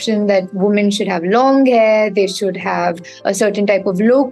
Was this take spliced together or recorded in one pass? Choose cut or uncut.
uncut